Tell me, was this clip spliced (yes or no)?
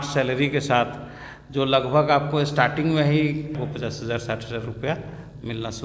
yes